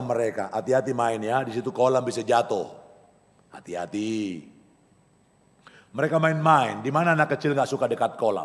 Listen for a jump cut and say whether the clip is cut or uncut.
uncut